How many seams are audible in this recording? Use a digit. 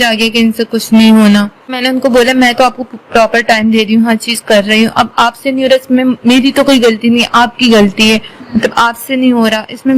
1